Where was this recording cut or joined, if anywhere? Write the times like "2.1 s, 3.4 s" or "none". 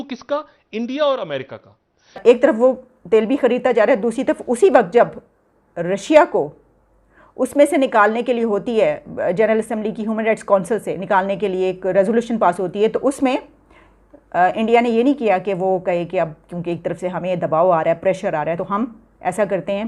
2.2 s, 18.6 s